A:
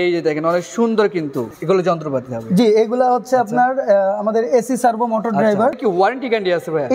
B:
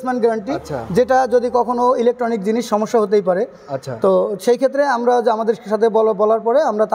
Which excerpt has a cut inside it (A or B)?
A